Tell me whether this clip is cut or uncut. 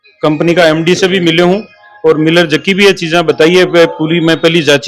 uncut